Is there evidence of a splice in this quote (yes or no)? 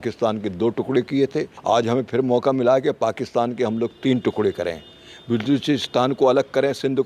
yes